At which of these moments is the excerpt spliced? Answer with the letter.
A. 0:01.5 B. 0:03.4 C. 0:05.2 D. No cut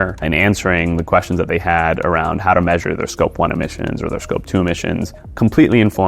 C